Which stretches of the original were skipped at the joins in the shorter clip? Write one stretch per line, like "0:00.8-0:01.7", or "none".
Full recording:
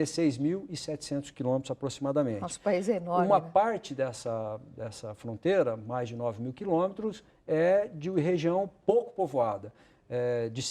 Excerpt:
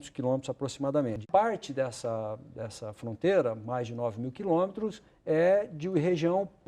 0:02.5-0:03.5